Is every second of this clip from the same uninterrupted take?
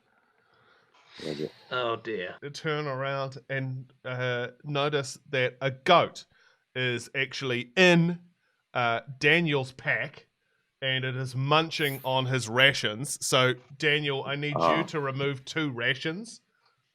no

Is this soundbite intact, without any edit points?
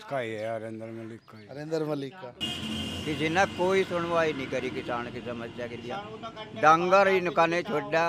no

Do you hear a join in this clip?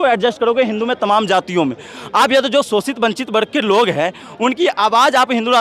no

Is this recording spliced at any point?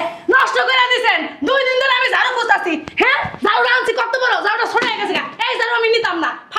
no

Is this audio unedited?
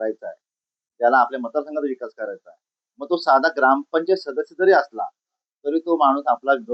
yes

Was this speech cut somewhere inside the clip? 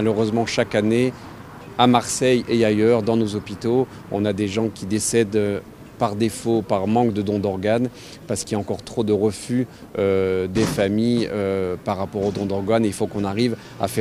no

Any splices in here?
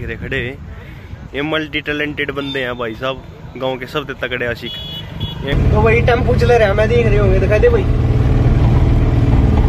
yes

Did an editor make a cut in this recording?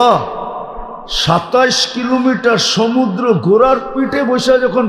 no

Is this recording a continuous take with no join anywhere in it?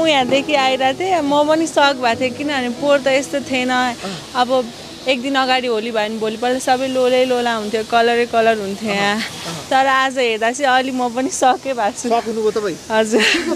yes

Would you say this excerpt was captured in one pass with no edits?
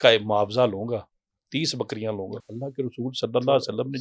no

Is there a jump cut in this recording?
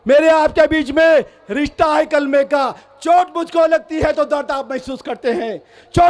no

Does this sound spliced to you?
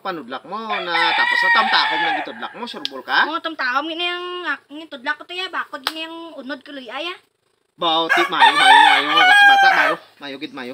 yes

